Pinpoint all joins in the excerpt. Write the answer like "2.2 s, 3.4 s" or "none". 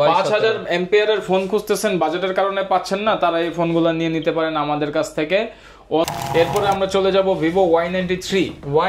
6.1 s